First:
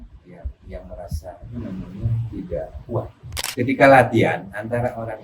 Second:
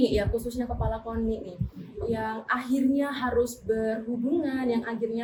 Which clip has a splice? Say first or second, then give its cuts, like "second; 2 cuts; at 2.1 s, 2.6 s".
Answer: first; 1 cut; at 3.4 s